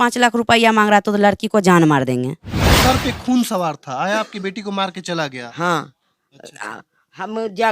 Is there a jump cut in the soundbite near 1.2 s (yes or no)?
no